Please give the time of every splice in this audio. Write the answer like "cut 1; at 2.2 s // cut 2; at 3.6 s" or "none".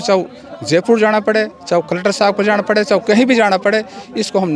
none